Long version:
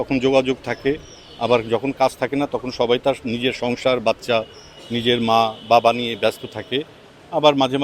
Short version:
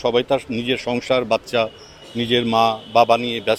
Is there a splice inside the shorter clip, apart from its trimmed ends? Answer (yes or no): no